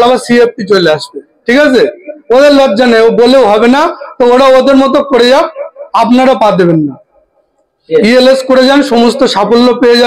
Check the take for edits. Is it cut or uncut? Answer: uncut